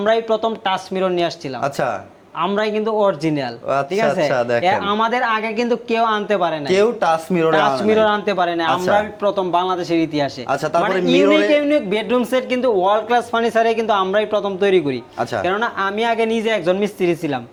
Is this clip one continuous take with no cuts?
yes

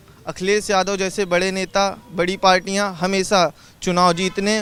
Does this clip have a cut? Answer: no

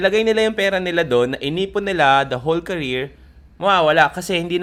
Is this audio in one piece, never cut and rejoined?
yes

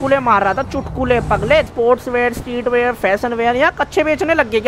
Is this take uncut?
no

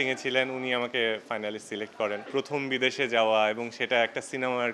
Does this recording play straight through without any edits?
no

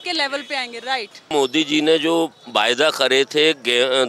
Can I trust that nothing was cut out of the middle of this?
no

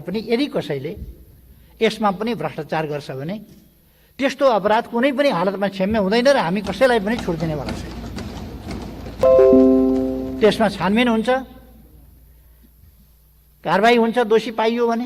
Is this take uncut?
yes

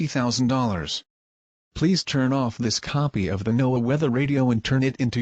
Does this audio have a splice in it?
yes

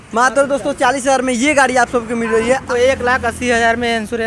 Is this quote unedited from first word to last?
no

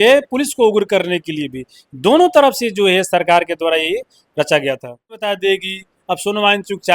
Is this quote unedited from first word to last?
no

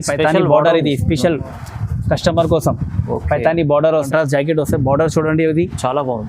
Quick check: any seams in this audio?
yes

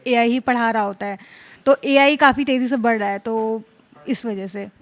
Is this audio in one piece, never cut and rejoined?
yes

